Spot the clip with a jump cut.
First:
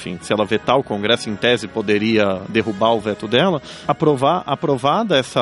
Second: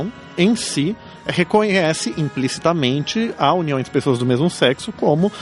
first; 1 cut; at 3.7 s

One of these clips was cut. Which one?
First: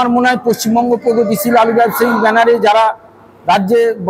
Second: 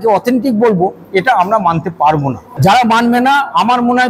second; 1 cut; at 2.5 s

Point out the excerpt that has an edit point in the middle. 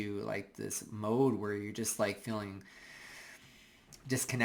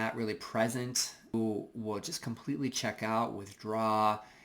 second; 1 cut; at 1.3 s

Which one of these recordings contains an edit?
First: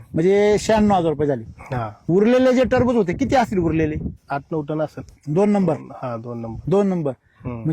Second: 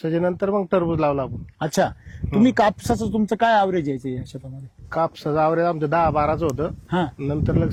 first; 2 cuts; at 2.1 s, 4.2 s

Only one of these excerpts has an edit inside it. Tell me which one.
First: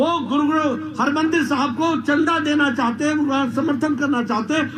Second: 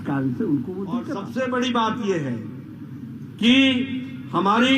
second; 1 cut; at 1.2 s

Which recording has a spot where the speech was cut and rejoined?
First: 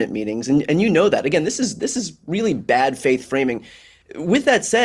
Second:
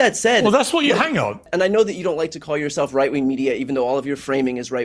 second; 1 cut; at 1.5 s

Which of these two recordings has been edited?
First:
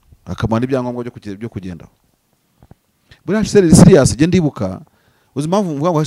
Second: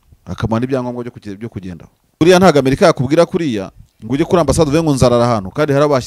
second; 1 cut; at 2.2 s

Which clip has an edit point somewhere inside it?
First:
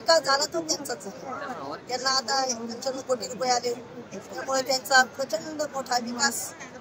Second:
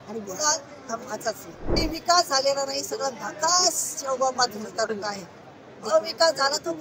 second; 1 cut; at 1.8 s

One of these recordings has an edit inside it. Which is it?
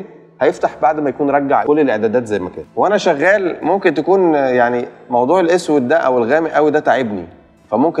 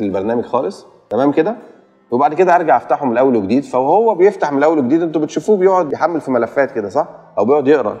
first; 1 cut; at 2.6 s

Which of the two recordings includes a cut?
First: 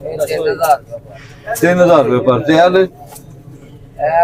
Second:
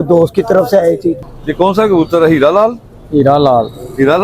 second; 1 cut; at 1.2 s

